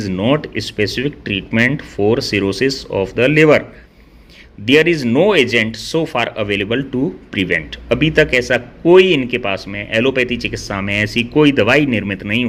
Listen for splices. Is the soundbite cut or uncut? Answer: uncut